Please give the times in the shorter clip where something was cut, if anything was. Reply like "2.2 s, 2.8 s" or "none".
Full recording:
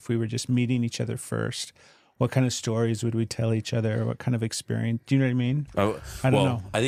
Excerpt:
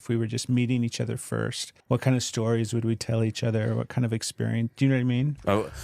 1.7 s